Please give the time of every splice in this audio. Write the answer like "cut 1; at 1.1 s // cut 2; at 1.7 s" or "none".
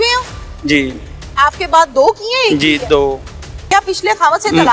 cut 1; at 3.6 s

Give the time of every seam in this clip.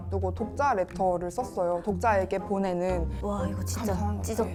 none

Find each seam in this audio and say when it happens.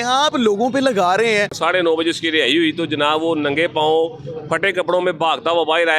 cut 1; at 1.6 s

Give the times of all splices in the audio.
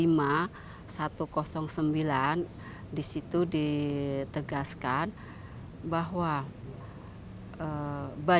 none

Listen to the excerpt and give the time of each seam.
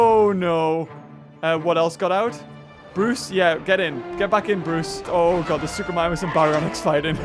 cut 1; at 5.0 s

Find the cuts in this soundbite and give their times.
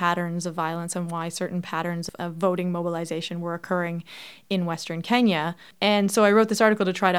cut 1; at 2.1 s // cut 2; at 5.6 s

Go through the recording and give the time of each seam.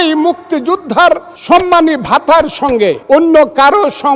cut 1; at 1.3 s // cut 2; at 3.0 s

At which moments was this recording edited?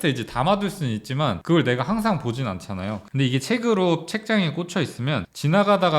cut 1; at 1.4 s // cut 2; at 3.0 s

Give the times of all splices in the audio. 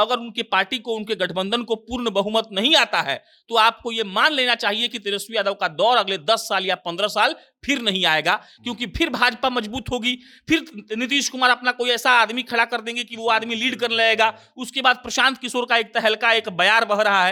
none

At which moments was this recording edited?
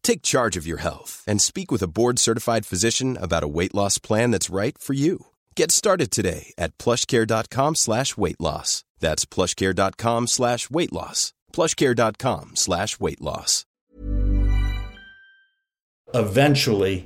cut 1; at 16.1 s

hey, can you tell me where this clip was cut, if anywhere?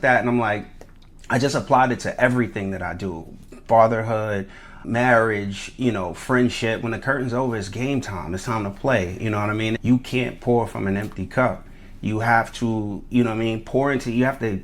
cut 1; at 4.8 s // cut 2; at 9.8 s

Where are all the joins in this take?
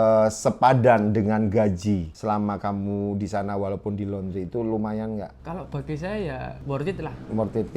cut 1; at 2.1 s // cut 2; at 5.4 s // cut 3; at 6.6 s

